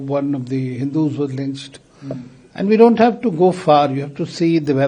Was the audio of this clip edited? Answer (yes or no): no